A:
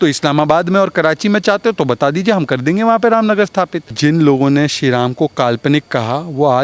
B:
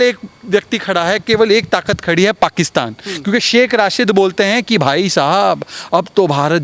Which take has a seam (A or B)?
A